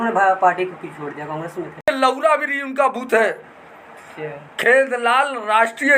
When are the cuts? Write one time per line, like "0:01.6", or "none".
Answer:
0:01.9